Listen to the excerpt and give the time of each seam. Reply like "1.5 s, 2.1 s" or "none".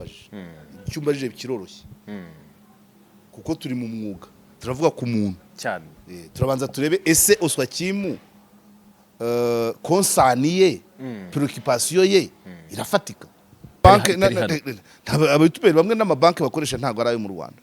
13.8 s